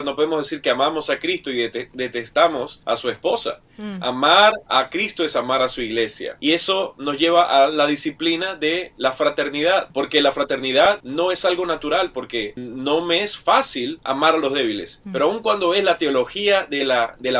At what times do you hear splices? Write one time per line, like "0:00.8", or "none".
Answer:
none